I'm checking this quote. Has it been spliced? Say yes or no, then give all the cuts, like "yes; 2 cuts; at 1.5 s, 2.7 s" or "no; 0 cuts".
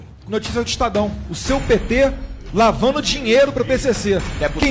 no; 0 cuts